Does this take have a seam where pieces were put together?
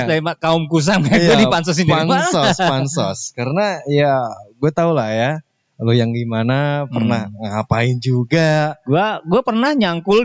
no; 0 cuts

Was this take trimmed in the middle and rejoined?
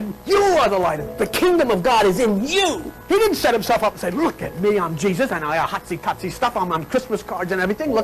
yes; 1 cut; at 3.0 s

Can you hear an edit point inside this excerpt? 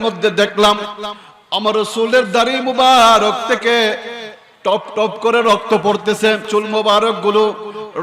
yes; 1 cut; at 6.5 s

